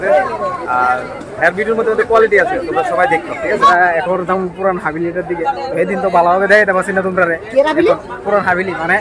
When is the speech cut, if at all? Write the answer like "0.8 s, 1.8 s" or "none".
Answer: 3.7 s, 8.0 s